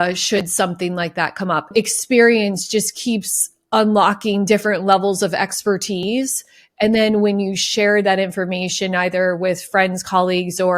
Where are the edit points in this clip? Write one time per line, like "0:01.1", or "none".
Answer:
0:01.7